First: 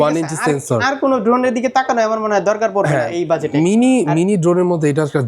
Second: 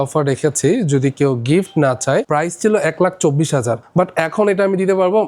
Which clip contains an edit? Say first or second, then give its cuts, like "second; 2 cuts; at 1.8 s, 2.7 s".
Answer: second; 2 cuts; at 2.3 s, 3.8 s